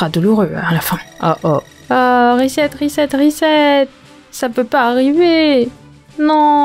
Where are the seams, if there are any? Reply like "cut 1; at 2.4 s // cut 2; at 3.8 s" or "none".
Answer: none